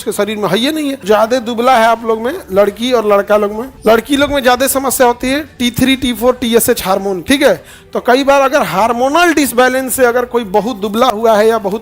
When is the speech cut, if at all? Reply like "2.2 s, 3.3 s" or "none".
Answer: 1.0 s, 3.7 s, 7.2 s